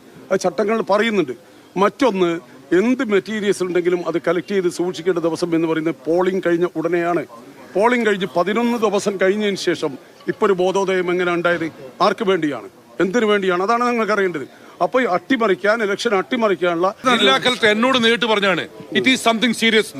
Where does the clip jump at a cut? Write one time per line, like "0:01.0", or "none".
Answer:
0:17.0